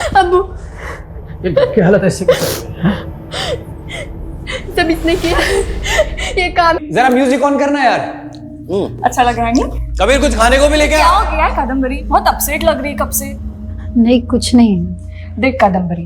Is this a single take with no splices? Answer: no; 1 cut; at 6.8 s

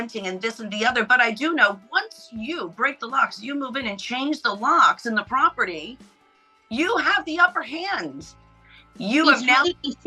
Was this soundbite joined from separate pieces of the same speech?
no; 0 cuts

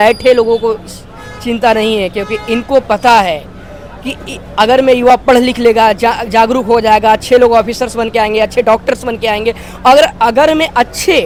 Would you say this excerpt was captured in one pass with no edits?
yes; 0 cuts

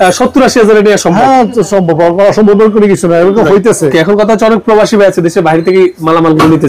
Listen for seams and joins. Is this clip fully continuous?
no; 1 cut; at 3.9 s

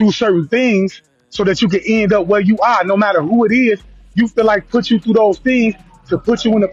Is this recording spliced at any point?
no; 0 cuts

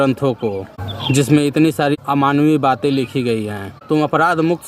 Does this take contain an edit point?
yes; 2 cuts; at 1.9 s, 3.7 s

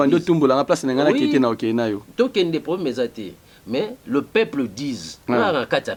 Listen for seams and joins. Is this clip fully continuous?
yes; 0 cuts

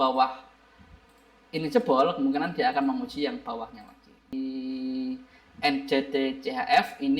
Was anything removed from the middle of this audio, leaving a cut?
yes; 1 cut; at 4.4 s

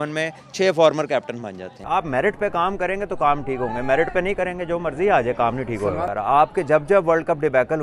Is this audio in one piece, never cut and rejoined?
no; 2 cuts; at 1.7 s, 6.1 s

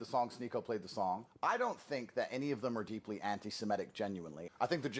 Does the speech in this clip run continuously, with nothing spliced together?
yes; 0 cuts

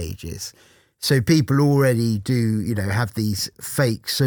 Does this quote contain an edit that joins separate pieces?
no; 0 cuts

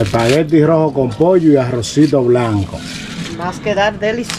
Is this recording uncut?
yes; 0 cuts

